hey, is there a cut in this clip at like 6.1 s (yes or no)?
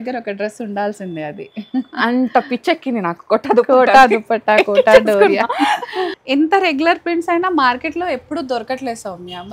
yes